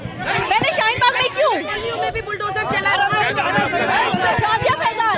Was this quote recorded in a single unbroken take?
yes; 0 cuts

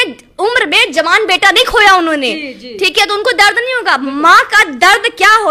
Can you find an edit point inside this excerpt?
no; 0 cuts

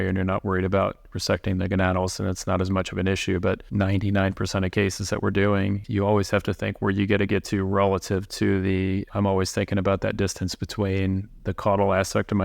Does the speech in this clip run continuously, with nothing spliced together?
no; 4 cuts; at 3.7 s, 5.8 s, 9.0 s, 11.3 s

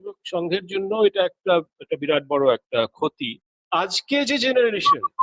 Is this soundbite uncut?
no; 1 cut; at 3.6 s

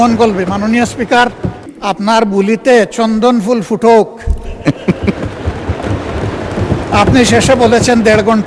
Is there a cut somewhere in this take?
yes; 1 cut; at 1.7 s

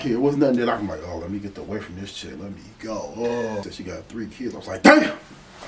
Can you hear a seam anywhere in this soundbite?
yes; 1 cut; at 3.7 s

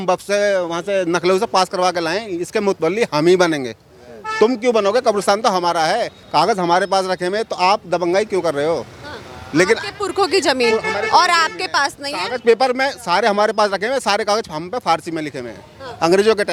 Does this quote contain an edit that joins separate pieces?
no; 0 cuts

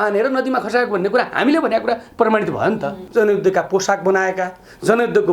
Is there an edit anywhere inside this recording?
yes; 1 cut; at 3.0 s

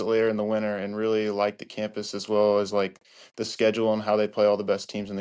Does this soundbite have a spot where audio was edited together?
no; 0 cuts

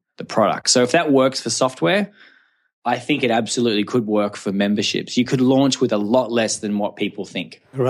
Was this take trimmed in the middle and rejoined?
no; 0 cuts

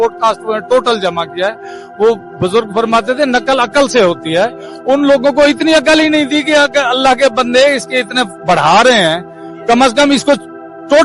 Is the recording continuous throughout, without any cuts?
yes; 0 cuts

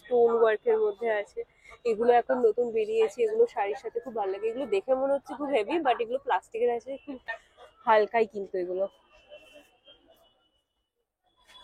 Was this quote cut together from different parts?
no; 0 cuts

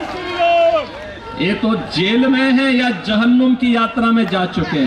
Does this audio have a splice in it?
no; 0 cuts

